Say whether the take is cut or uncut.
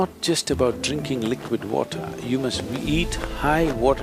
uncut